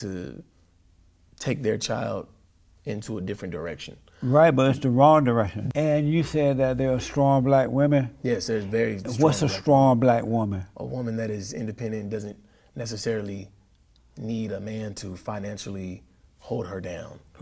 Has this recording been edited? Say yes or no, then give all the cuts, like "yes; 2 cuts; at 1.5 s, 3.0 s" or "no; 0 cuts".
yes; 1 cut; at 5.6 s